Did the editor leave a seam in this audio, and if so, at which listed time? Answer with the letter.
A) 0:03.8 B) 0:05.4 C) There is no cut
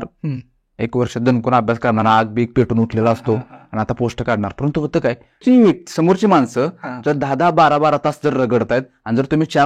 B